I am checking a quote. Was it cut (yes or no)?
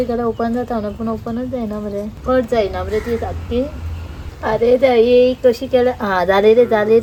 no